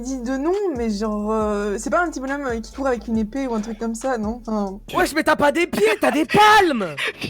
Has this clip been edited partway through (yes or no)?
yes